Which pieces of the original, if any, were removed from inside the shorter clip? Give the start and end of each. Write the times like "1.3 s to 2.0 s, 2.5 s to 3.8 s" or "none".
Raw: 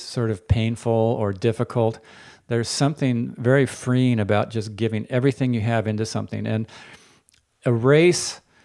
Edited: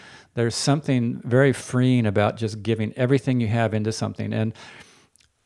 none